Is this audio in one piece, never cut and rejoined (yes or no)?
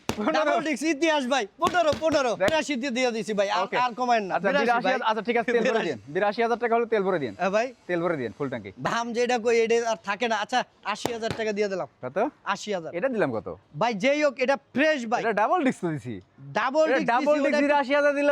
no